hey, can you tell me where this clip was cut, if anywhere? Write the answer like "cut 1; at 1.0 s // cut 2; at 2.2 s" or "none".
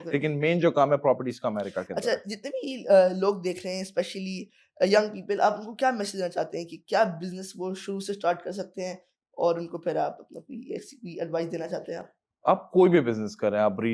none